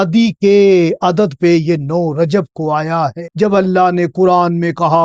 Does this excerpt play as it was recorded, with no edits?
no; 1 cut; at 3.2 s

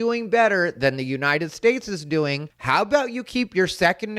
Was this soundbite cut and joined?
yes; 1 cut; at 2.5 s

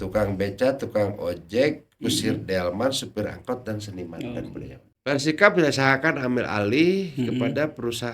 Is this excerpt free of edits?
no; 1 cut; at 4.8 s

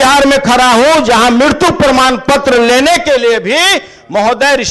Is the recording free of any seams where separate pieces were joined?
yes; 0 cuts

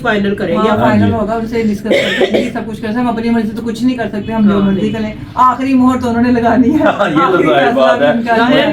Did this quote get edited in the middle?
no; 0 cuts

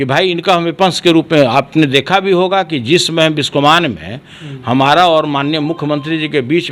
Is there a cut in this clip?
no; 0 cuts

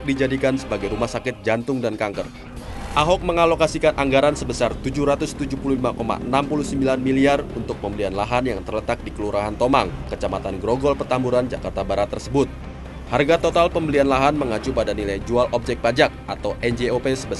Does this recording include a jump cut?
no; 0 cuts

